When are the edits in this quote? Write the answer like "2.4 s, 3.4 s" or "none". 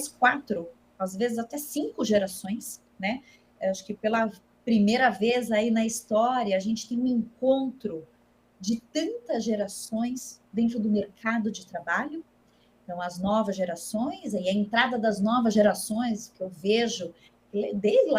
none